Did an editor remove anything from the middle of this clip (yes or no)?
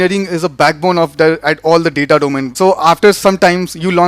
yes